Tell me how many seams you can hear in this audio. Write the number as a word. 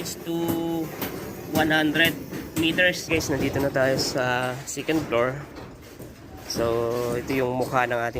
one